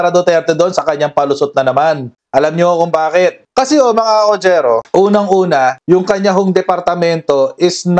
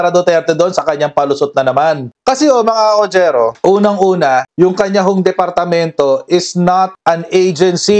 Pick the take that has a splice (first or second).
second